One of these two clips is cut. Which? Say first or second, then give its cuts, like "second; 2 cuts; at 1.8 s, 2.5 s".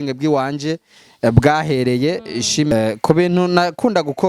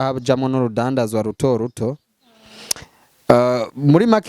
first; 1 cut; at 2.7 s